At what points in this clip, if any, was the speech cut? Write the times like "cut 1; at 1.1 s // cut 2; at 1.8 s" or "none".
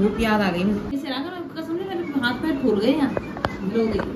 cut 1; at 1.0 s